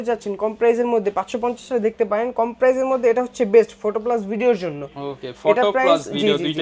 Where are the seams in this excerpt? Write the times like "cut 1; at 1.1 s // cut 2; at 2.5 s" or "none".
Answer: none

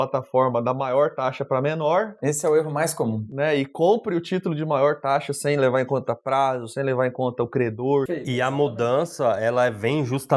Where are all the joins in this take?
cut 1; at 8.1 s

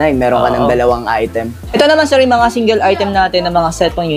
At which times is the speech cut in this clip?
cut 1; at 1.6 s

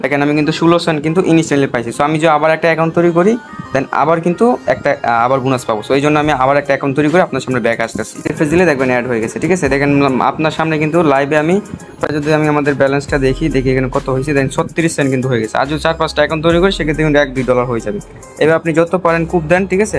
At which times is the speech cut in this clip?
cut 1; at 8.3 s // cut 2; at 12.1 s

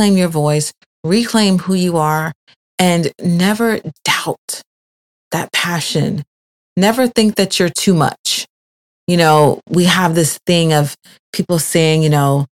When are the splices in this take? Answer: none

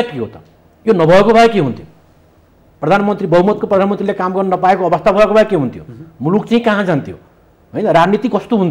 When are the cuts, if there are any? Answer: none

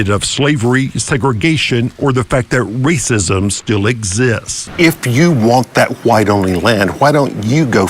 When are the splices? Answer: cut 1; at 4.6 s

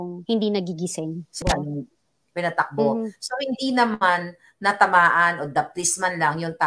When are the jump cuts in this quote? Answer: cut 1; at 1.4 s

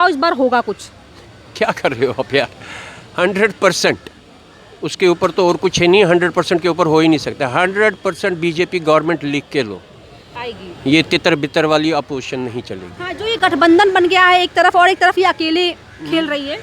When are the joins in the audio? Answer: none

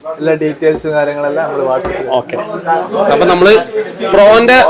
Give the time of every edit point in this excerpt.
none

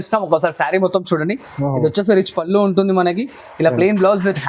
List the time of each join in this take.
none

